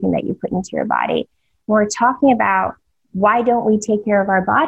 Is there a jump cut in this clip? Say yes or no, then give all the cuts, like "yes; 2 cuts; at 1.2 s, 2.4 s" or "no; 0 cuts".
yes; 1 cut; at 1.5 s